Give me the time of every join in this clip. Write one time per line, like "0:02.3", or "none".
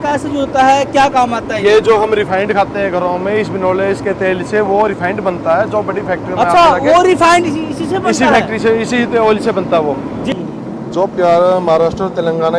0:10.3